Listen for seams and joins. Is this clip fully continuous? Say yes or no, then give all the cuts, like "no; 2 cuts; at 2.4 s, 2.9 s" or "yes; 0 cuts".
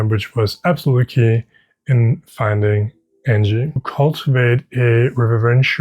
no; 1 cut; at 3.8 s